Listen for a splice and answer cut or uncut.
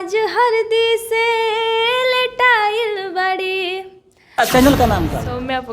cut